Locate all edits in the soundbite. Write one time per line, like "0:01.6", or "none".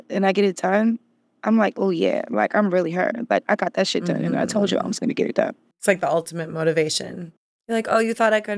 0:05.8
0:07.7